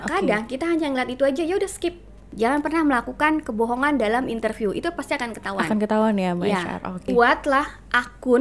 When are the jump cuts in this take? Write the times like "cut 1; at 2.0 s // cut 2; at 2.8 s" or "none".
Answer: cut 1; at 2.3 s // cut 2; at 7.1 s